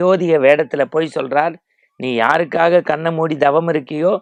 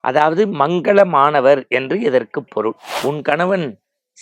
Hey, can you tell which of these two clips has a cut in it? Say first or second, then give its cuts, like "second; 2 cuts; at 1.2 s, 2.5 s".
second; 1 cut; at 2.9 s